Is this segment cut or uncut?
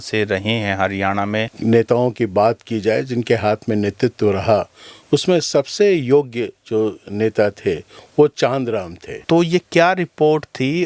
cut